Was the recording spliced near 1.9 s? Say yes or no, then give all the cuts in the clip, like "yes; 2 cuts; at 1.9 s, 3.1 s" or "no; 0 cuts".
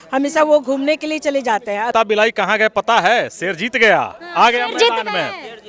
yes; 1 cut; at 1.9 s